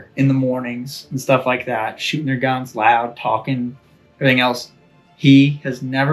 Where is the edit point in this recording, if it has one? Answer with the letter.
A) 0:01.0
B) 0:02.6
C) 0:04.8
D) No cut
D